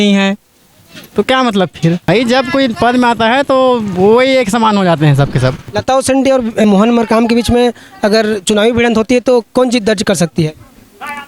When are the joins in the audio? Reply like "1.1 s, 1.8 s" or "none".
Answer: 2.0 s, 5.7 s